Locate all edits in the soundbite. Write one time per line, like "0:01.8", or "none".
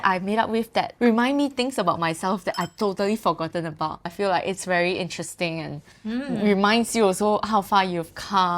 0:00.9
0:04.1